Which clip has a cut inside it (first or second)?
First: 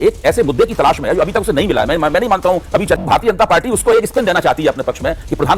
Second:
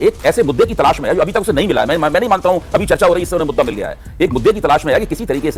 first